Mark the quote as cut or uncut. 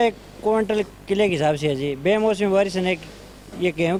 uncut